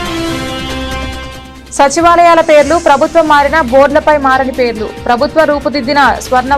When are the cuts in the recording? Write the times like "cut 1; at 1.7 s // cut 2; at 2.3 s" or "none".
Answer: cut 1; at 1.0 s // cut 2; at 1.7 s